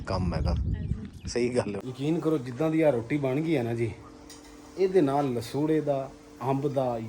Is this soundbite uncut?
no; 1 cut; at 1.8 s

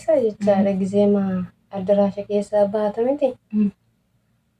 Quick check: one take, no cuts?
yes; 0 cuts

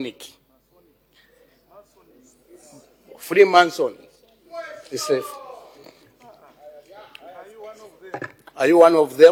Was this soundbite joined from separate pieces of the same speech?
no; 0 cuts

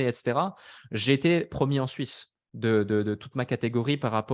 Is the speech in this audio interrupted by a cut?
no; 0 cuts

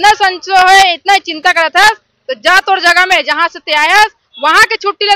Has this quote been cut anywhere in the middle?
no; 0 cuts

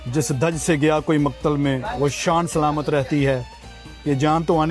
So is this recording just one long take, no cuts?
yes; 0 cuts

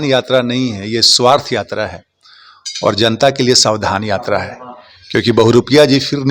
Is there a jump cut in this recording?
no; 0 cuts

